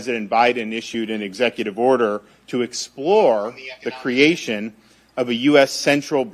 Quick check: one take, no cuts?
yes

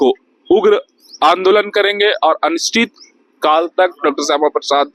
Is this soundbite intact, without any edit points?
yes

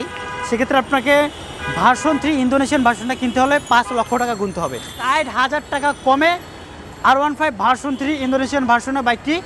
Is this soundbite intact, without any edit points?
no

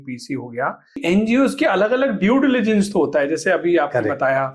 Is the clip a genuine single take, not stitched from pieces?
no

